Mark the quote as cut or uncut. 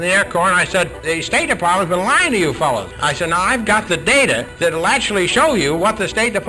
cut